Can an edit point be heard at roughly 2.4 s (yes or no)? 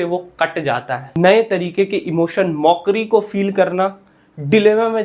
no